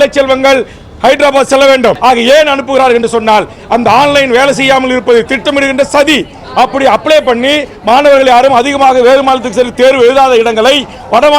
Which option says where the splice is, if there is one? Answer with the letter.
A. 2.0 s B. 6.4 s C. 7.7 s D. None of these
A